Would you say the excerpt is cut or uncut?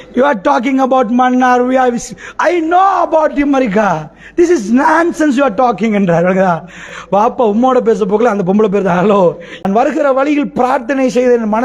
cut